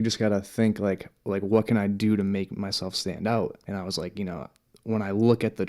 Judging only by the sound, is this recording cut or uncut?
cut